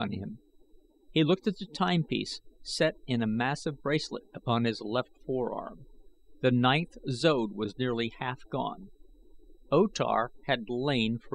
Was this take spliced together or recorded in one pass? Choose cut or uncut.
uncut